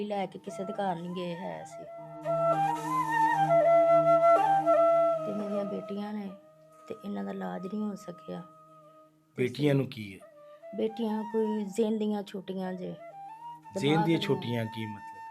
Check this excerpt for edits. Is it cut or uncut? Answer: cut